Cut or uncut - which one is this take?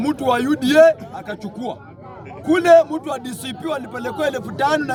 uncut